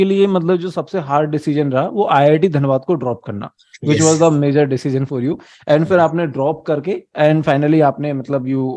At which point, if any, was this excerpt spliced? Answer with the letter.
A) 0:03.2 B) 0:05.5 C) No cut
C